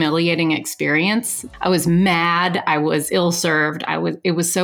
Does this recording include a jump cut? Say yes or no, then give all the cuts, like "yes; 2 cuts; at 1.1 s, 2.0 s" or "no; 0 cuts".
yes; 1 cut; at 1.4 s